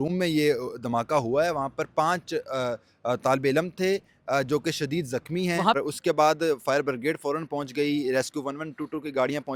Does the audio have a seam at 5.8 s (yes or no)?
yes